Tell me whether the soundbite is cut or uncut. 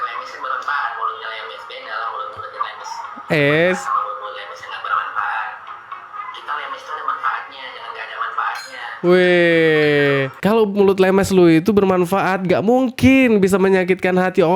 cut